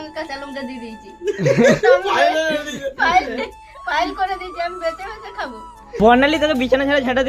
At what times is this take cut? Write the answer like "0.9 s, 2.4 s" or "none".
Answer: 6.0 s

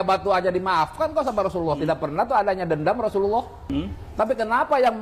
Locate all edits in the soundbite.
3.6 s

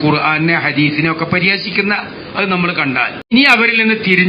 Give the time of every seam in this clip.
3.3 s

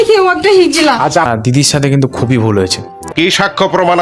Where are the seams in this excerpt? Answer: 1.3 s

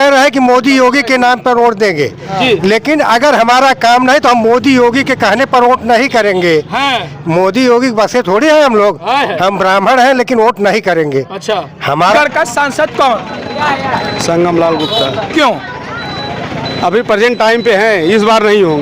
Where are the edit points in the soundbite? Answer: 12.2 s

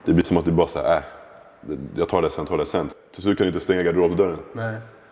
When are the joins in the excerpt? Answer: 2.9 s

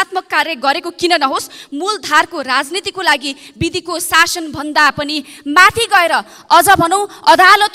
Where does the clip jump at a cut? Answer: none

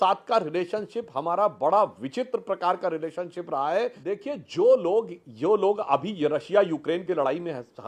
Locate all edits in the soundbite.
4.0 s

